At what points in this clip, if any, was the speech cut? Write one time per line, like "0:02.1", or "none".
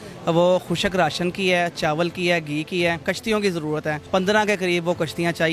0:03.0
0:04.0